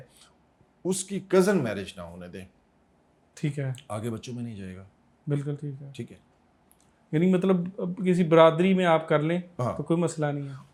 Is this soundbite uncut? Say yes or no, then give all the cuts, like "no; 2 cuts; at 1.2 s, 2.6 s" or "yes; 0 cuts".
yes; 0 cuts